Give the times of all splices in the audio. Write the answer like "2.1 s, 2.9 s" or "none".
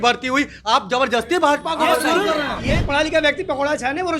2.6 s